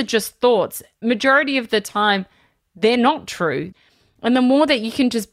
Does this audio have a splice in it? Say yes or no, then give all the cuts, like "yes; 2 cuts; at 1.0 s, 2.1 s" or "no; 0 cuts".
yes; 2 cuts; at 1.0 s, 3.7 s